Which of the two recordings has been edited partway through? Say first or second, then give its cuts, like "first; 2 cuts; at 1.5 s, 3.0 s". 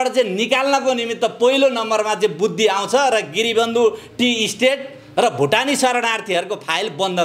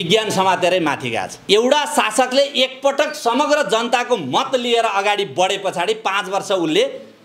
second; 1 cut; at 1.3 s